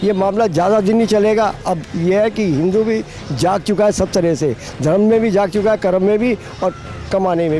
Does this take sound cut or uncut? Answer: uncut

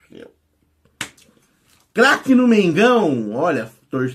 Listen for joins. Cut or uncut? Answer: uncut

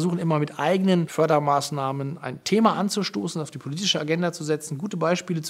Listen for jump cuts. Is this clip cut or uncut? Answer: cut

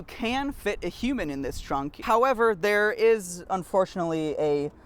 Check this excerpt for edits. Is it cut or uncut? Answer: cut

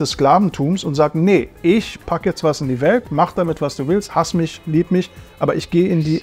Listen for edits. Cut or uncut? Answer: uncut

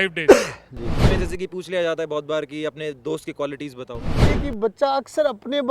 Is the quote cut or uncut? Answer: cut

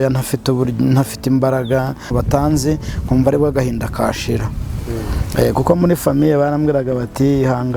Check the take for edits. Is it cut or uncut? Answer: cut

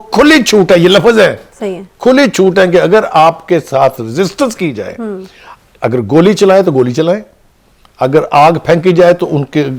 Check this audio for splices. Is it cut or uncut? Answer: uncut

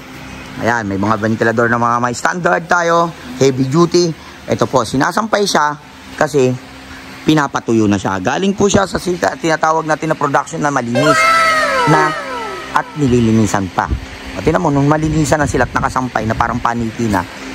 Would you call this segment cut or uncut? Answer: uncut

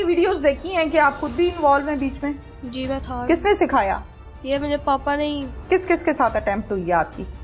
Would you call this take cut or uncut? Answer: cut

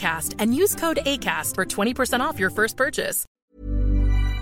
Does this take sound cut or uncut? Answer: cut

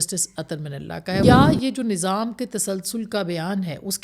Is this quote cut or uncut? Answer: cut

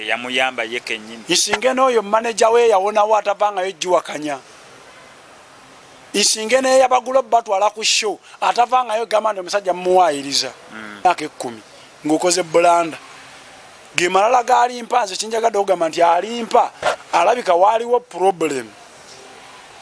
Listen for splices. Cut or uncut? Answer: cut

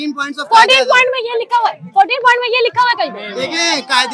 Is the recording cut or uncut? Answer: uncut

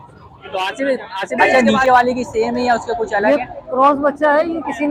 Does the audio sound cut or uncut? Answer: cut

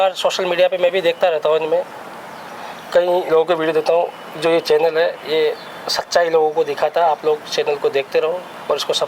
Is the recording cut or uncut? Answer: uncut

